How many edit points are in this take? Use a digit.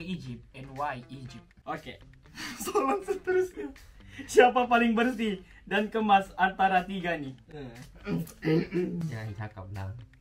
1